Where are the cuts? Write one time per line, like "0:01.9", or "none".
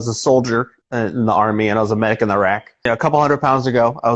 0:02.9